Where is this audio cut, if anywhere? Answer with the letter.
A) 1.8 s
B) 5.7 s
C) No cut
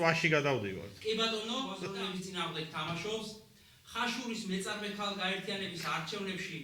A